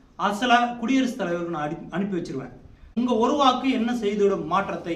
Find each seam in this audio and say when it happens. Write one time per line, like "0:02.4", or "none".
0:02.9